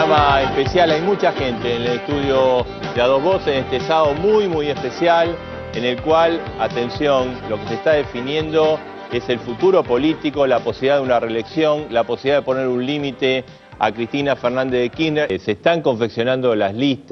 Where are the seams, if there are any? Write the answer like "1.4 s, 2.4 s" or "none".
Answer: none